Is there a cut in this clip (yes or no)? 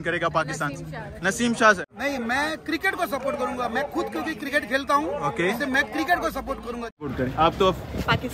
yes